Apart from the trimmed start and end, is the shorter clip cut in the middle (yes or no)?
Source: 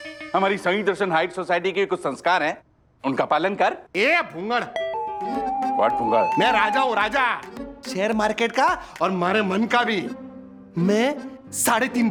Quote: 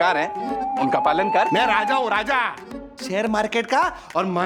yes